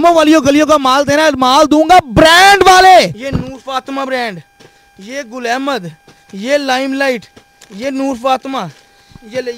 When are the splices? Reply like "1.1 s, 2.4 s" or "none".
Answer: 3.1 s